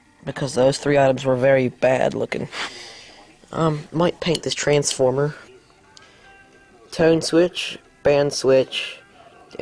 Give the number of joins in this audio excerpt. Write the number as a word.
zero